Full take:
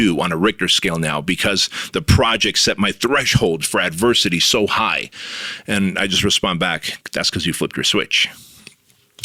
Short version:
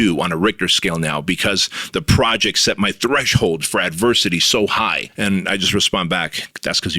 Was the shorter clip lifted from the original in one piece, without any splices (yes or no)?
no